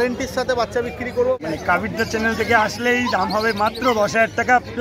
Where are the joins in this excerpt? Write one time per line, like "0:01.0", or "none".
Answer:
0:01.4